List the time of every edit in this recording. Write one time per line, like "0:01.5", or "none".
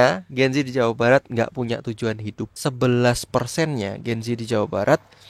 0:02.5